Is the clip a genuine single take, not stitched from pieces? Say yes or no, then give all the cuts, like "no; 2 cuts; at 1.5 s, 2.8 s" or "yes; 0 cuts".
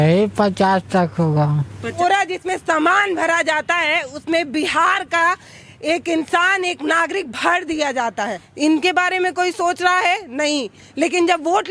no; 2 cuts; at 2.0 s, 8.4 s